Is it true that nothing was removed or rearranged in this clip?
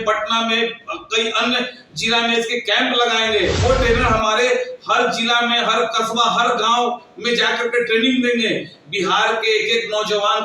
no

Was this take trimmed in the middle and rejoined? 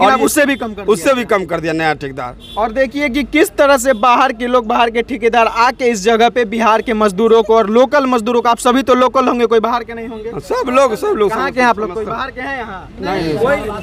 no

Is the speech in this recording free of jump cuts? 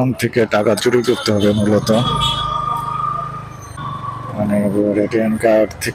no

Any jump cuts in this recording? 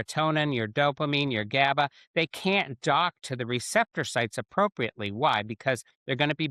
no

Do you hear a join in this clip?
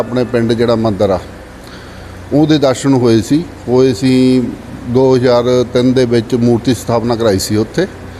no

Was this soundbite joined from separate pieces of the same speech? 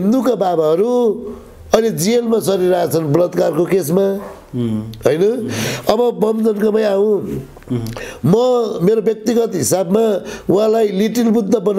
no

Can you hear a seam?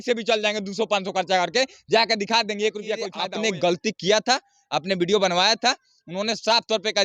yes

